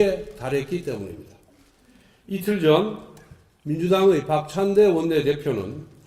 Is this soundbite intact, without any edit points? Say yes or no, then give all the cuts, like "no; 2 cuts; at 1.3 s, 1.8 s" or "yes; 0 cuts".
yes; 0 cuts